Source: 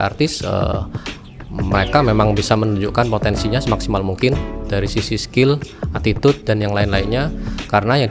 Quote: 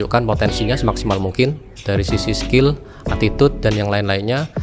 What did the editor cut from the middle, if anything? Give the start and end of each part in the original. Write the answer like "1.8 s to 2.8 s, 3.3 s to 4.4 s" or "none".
none